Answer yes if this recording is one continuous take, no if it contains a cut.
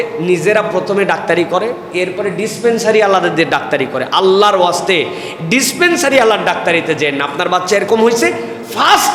yes